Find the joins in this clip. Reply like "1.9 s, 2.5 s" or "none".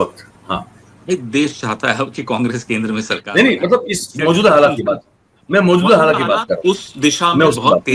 none